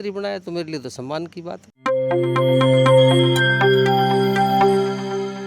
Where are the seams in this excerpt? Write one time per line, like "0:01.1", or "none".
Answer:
0:01.7